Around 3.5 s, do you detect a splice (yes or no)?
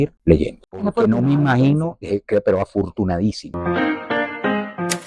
yes